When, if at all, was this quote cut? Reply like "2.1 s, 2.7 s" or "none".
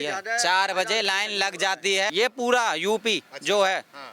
2.1 s